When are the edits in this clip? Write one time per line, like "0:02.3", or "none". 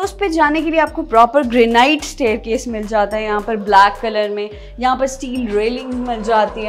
none